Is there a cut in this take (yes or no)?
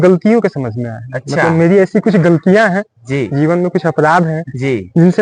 no